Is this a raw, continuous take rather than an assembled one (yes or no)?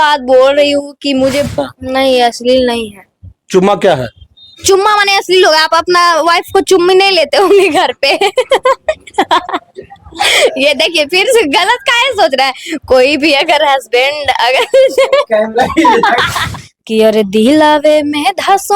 no